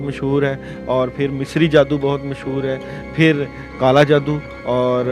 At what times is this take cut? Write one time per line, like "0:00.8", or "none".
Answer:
0:03.6